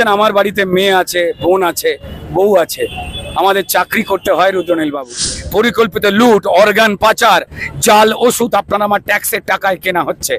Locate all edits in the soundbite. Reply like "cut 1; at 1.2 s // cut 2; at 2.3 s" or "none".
cut 1; at 5.4 s